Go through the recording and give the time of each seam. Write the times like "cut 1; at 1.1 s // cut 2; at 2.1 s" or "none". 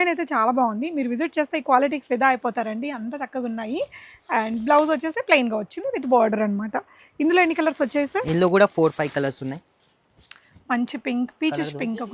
none